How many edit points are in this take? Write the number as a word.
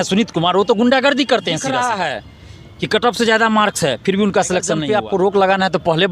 two